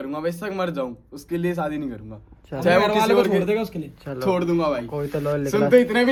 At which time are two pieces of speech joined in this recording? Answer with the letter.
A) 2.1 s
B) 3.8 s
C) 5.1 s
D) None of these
D